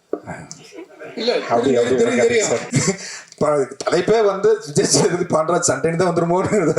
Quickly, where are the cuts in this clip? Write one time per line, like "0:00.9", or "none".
0:02.7